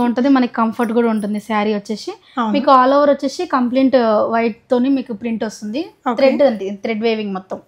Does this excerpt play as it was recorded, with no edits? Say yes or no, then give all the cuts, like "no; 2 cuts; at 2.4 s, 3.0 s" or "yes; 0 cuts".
yes; 0 cuts